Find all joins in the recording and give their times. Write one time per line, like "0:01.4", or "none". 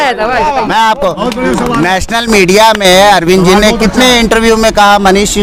none